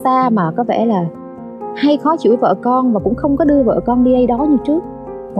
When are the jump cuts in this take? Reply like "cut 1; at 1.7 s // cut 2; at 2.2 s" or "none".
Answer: none